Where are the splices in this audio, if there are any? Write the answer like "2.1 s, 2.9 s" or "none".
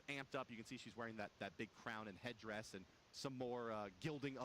2.0 s

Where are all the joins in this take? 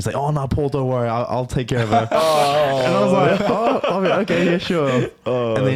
none

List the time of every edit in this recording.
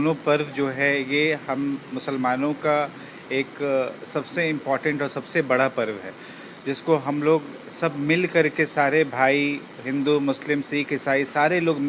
none

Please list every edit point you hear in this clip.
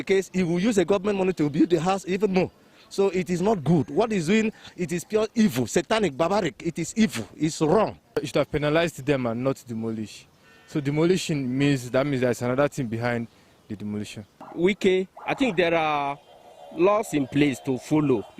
8.2 s, 14.5 s

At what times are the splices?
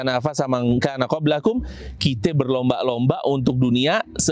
none

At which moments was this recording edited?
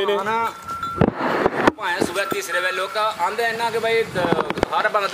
none

